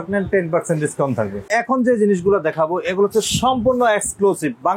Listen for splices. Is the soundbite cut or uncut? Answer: cut